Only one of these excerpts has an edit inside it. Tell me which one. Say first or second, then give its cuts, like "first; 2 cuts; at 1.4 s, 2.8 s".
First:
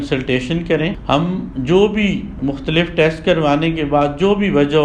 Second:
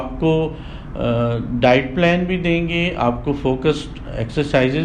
first; 1 cut; at 1.0 s